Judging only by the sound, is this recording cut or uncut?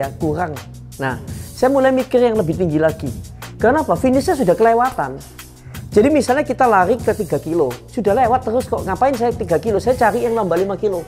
uncut